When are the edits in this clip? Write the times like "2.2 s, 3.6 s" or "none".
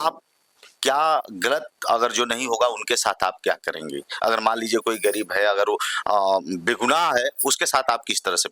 none